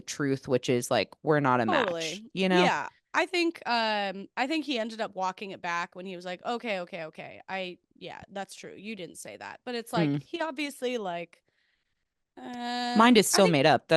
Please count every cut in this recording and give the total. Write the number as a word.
zero